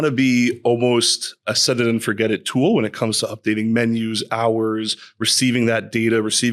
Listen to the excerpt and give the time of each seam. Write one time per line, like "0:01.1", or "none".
0:01.6